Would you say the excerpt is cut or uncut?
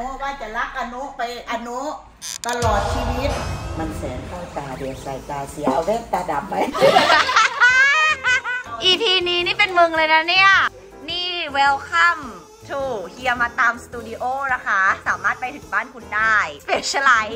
uncut